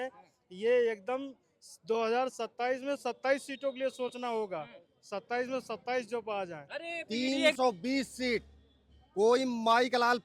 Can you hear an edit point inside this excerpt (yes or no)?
yes